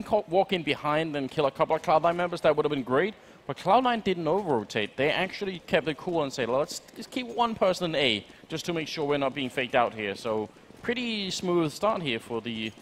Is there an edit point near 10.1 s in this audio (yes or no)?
yes